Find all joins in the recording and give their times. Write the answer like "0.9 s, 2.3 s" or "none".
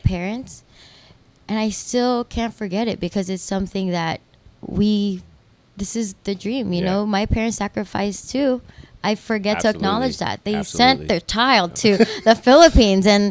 none